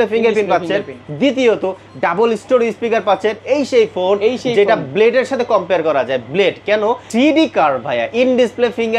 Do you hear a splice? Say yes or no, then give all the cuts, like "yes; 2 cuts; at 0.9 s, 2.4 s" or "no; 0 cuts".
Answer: yes; 2 cuts; at 3.4 s, 7.0 s